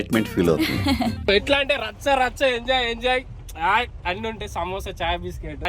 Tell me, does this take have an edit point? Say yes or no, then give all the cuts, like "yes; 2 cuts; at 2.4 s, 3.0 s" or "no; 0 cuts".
yes; 1 cut; at 1.3 s